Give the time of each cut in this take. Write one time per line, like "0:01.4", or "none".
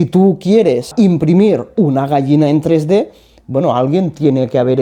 0:00.9